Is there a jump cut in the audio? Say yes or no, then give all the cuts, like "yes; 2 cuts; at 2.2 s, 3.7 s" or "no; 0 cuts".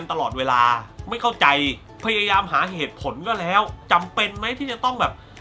yes; 2 cuts; at 0.9 s, 3.8 s